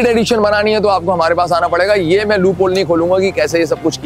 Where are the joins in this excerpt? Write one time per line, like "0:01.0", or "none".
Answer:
none